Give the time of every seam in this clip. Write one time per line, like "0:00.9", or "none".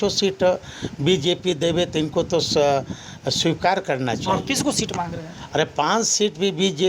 none

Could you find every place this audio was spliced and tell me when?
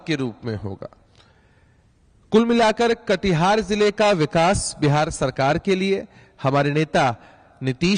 none

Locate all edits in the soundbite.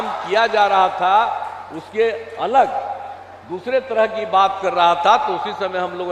none

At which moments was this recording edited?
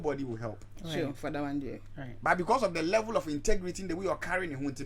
none

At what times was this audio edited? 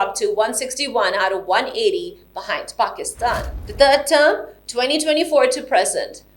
0:03.5

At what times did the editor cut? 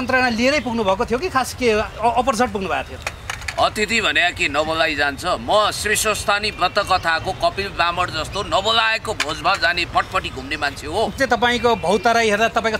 0:11.2

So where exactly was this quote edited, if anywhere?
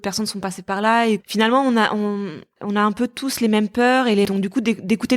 0:01.2
0:02.5
0:04.3

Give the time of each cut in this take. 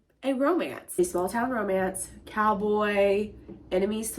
0:01.0

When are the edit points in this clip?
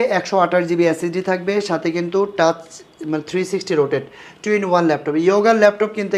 none

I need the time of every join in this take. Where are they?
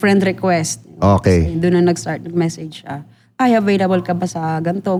none

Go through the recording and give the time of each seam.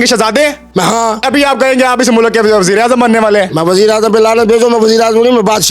0:01.2

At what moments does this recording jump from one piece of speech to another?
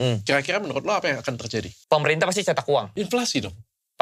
0:01.7
0:02.9

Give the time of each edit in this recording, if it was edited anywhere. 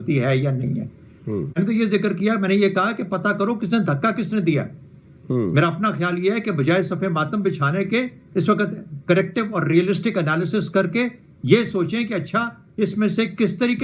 none

